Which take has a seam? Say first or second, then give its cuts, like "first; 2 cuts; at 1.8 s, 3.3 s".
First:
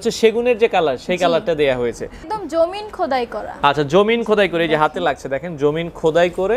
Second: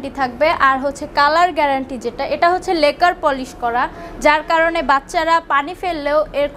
first; 1 cut; at 2.3 s